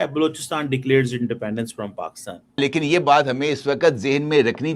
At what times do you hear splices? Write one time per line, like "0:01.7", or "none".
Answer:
0:02.6